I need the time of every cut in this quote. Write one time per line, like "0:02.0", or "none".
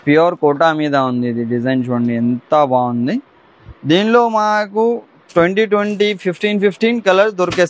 none